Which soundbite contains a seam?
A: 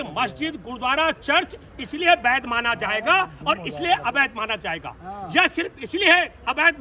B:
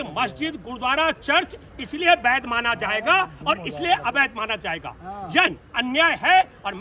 B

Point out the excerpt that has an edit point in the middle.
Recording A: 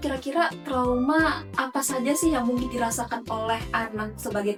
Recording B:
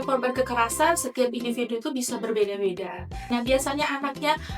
B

